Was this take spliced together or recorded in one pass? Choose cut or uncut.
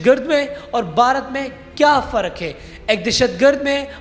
uncut